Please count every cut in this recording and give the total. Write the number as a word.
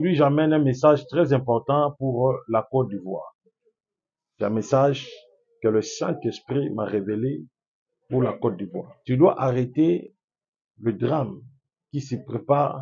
one